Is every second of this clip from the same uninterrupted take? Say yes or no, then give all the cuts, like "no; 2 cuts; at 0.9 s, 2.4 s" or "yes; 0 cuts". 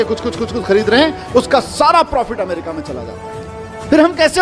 no; 1 cut; at 3.2 s